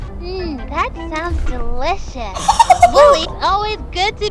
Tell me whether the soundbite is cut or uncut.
cut